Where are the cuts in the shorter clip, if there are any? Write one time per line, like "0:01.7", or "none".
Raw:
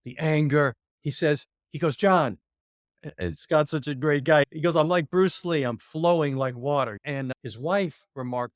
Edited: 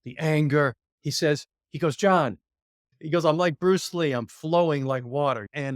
0:03.0